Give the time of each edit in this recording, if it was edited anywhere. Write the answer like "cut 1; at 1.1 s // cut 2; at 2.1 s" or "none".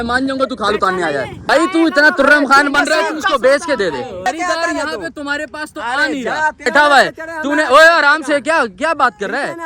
cut 1; at 1.5 s // cut 2; at 4.3 s // cut 3; at 6.7 s